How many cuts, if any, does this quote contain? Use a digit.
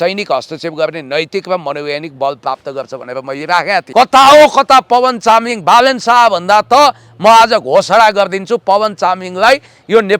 1